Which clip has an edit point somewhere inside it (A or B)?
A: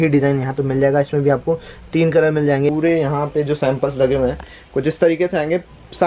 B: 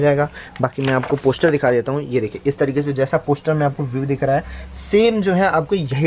A